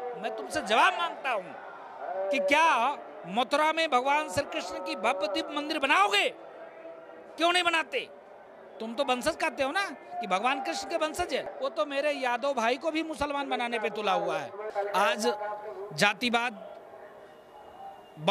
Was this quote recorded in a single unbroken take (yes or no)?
no